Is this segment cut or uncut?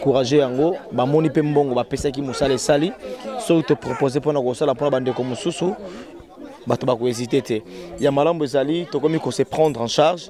uncut